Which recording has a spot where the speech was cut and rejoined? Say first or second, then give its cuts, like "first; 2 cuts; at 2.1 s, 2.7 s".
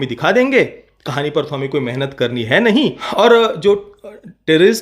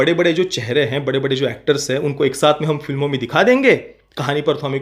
first; 1 cut; at 3.0 s